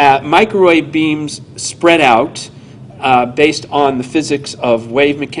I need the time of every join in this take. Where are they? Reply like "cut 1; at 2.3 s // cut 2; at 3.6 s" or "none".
cut 1; at 2.2 s

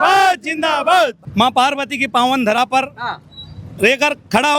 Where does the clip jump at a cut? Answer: cut 1; at 1.2 s

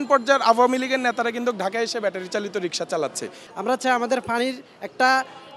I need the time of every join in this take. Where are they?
cut 1; at 3.3 s

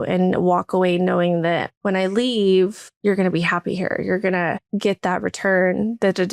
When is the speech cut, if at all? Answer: cut 1; at 1.7 s // cut 2; at 2.9 s // cut 3; at 4.6 s

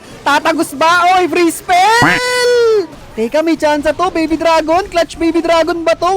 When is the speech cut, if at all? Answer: cut 1; at 3.0 s

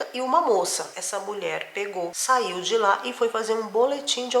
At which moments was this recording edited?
cut 1; at 0.9 s

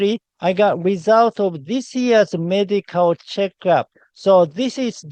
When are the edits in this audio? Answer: none

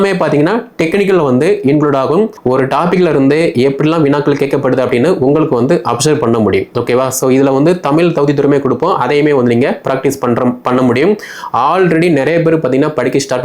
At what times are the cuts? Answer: cut 1; at 2.4 s

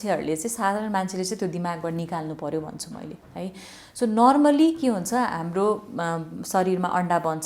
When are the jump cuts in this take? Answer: none

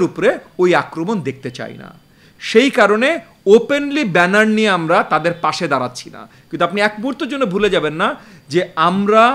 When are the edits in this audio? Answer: none

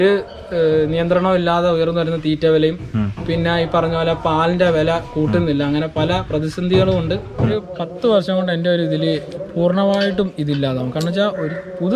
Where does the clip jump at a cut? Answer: cut 1; at 7.5 s

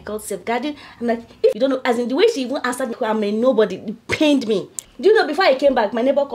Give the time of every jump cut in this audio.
cut 1; at 1.5 s // cut 2; at 2.9 s // cut 3; at 4.7 s

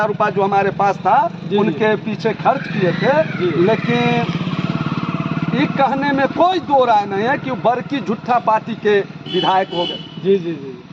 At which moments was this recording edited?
none

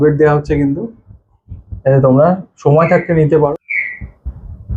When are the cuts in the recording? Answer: cut 1; at 3.5 s

